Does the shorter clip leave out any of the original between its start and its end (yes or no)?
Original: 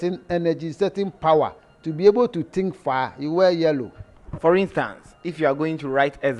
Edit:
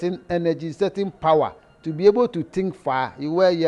no